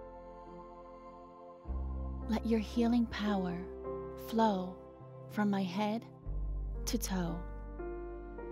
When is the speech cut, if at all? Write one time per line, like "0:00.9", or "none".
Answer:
none